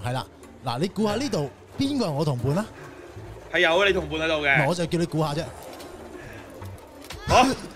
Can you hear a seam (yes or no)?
yes